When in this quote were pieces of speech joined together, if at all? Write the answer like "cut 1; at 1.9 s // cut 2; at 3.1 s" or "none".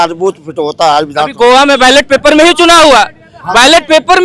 none